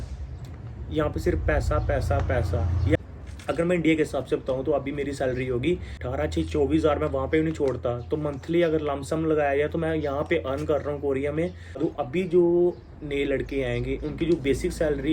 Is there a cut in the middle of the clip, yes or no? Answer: yes